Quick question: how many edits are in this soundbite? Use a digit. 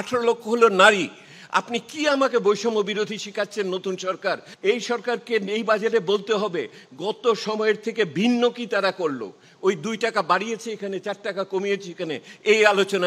1